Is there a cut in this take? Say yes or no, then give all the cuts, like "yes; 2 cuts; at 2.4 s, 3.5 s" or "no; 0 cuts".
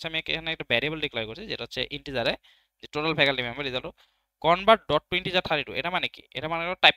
no; 0 cuts